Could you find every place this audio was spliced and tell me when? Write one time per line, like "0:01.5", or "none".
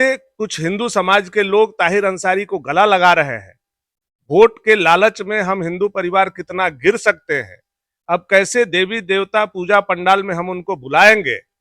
none